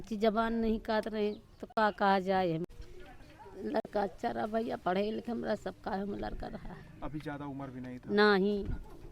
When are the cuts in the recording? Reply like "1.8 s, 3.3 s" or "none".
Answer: 2.6 s